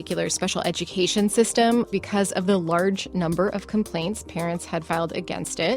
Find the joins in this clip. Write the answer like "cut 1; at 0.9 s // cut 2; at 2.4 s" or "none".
cut 1; at 1.9 s